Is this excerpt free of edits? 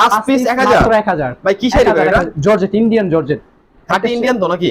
yes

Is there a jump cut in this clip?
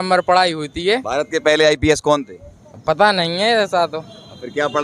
no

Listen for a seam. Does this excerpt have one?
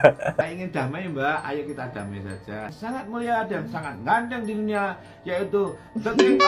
no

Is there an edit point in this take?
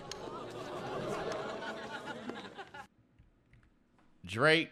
no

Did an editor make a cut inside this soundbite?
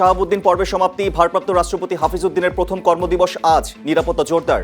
no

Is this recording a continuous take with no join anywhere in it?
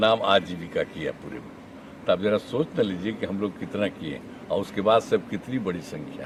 yes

